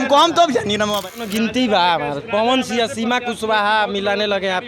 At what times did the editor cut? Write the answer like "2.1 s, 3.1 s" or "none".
1.1 s